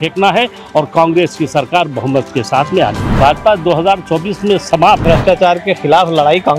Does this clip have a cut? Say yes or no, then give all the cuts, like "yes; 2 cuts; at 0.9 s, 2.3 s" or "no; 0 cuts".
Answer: yes; 2 cuts; at 3.1 s, 5.0 s